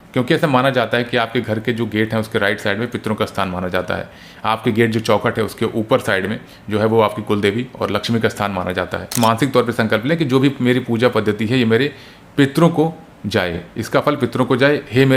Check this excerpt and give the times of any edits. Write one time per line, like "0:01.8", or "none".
0:09.1

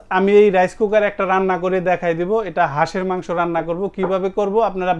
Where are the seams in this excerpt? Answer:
none

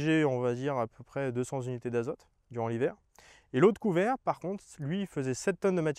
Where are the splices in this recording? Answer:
none

